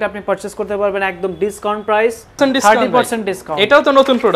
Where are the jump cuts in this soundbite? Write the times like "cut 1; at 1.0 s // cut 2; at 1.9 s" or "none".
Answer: cut 1; at 2.4 s